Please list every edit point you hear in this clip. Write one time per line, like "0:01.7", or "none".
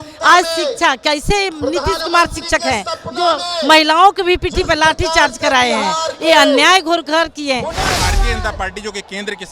0:08.0